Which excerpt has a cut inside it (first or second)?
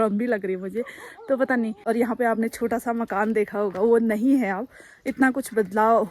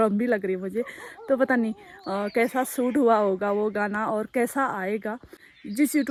first